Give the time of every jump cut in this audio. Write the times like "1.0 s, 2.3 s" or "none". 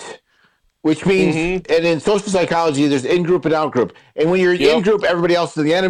none

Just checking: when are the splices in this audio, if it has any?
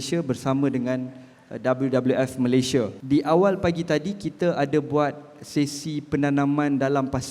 3.0 s

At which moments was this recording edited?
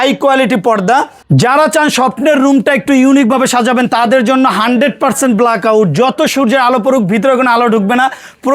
1.2 s

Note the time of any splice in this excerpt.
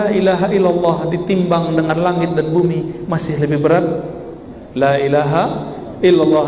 none

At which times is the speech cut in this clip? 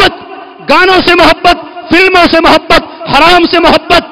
none

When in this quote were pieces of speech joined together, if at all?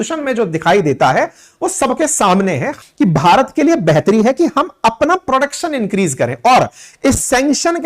2.7 s

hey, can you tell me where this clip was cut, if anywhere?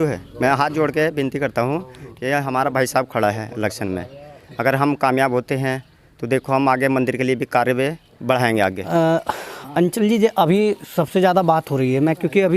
8.8 s

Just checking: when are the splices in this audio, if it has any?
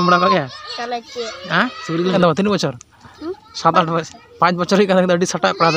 2.2 s

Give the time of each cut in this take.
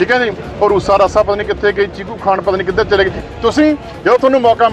3.2 s

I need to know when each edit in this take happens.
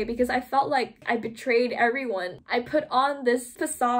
1.0 s, 2.4 s

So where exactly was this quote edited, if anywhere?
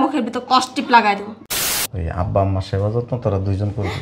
1.4 s

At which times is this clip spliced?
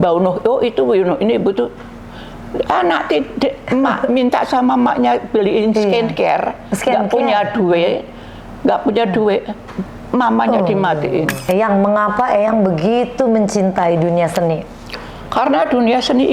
11.4 s

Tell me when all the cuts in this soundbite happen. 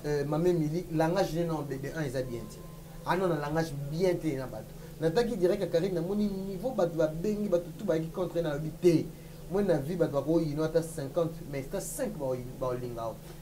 none

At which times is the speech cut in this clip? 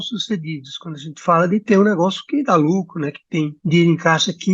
3.6 s

